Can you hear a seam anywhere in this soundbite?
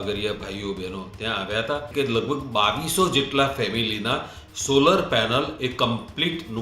yes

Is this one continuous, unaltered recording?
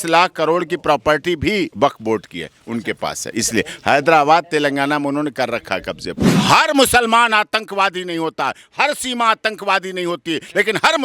no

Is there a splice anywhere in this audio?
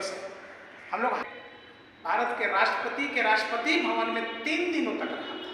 yes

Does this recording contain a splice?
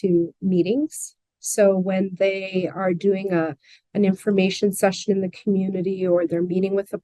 no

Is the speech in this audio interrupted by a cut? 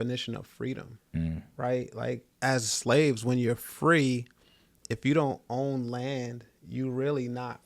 yes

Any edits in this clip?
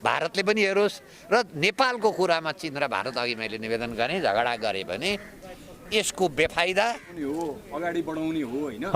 yes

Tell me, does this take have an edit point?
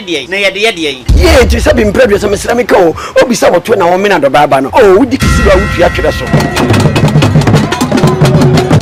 no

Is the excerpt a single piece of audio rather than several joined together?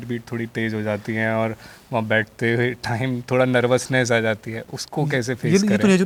yes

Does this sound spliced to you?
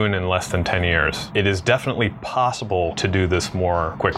no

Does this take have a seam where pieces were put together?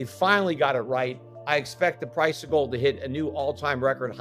yes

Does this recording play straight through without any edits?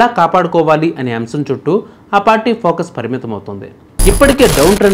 no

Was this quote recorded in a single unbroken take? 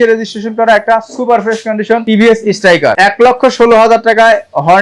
yes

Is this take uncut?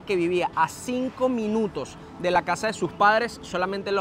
yes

